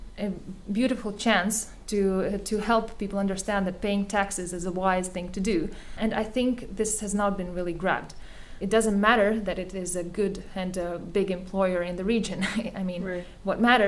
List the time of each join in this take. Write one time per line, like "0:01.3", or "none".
0:05.9
0:08.6